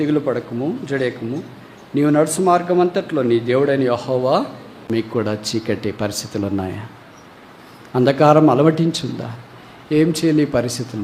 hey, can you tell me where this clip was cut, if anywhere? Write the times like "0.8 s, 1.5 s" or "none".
4.7 s